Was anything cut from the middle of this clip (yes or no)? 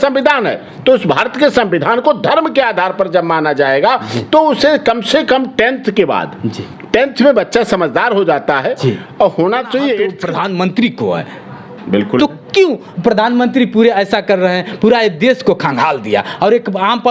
yes